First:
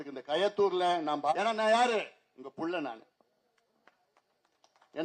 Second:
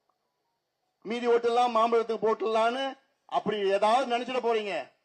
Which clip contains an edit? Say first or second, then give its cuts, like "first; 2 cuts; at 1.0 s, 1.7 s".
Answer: first; 1 cut; at 1.3 s